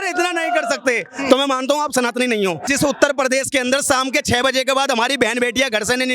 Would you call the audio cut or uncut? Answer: cut